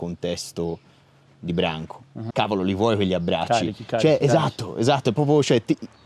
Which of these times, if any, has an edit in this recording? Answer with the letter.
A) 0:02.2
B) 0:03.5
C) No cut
A